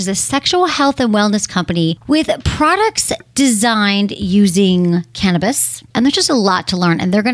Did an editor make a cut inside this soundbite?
yes; 3 cuts; at 2.0 s, 3.2 s, 5.9 s

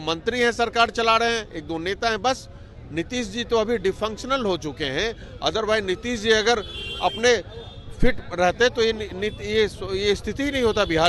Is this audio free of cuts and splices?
yes; 0 cuts

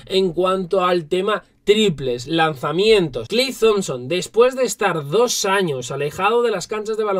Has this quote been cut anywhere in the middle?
yes; 1 cut; at 3.2 s

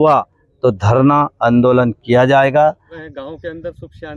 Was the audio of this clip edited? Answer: yes; 1 cut; at 2.9 s

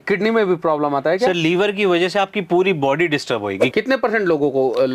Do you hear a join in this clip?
yes; 1 cut; at 3.6 s

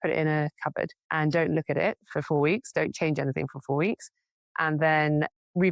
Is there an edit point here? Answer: yes; 1 cut; at 1.0 s

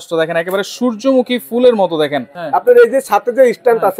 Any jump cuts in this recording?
yes; 1 cut; at 2.3 s

